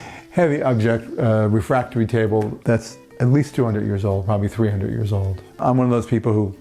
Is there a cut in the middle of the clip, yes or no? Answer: yes